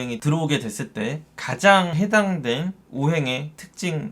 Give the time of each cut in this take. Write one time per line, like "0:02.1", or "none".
0:01.9